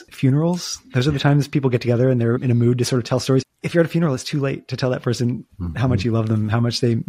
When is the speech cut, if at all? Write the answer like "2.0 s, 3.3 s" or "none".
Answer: none